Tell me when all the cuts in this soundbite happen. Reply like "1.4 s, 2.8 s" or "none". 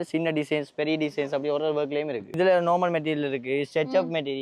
2.2 s